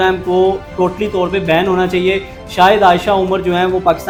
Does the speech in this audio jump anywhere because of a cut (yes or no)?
no